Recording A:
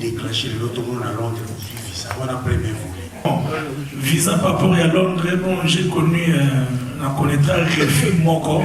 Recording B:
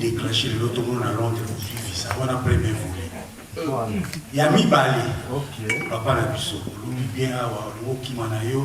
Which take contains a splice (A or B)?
A